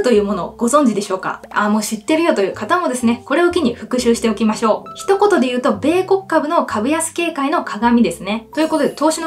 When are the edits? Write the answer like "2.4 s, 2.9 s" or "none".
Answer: none